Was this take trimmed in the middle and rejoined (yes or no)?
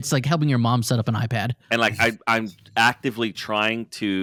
no